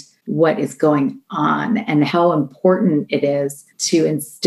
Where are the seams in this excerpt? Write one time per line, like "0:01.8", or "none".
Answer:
0:02.1